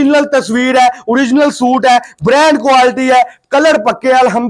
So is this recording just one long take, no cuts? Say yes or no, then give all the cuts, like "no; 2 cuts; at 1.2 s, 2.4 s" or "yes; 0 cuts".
yes; 0 cuts